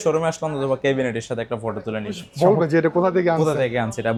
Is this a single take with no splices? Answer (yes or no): yes